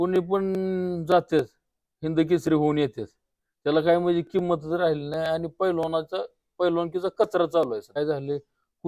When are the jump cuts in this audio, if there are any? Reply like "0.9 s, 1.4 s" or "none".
8.0 s